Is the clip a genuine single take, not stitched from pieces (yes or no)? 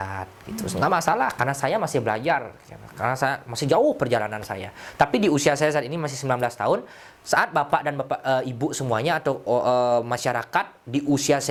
yes